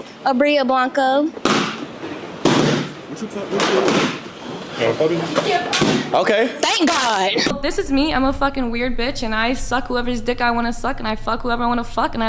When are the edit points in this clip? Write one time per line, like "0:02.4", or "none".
0:01.4
0:07.5

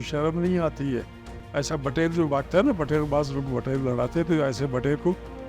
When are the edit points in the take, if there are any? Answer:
0:01.2

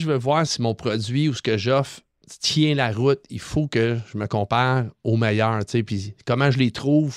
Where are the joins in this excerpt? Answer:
none

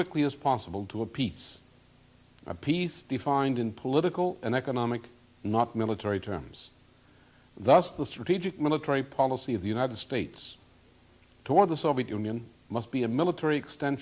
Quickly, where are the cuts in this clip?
0:08.7

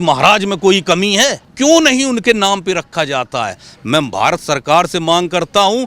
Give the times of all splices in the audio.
0:01.4

